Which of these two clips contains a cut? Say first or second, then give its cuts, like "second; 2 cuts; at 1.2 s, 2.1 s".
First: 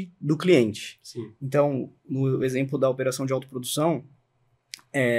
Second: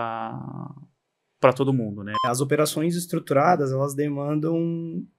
second; 1 cut; at 2.2 s